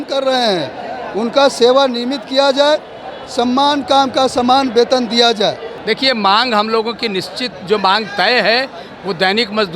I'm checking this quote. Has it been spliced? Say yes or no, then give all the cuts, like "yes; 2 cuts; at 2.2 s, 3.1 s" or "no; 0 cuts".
yes; 1 cut; at 5.7 s